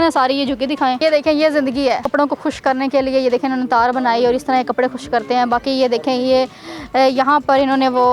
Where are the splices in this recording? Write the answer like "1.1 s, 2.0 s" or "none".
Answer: 1.0 s, 2.0 s